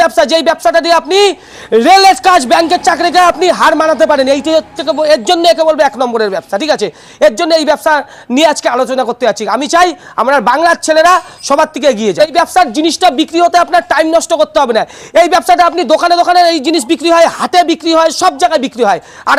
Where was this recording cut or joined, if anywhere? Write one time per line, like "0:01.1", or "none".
none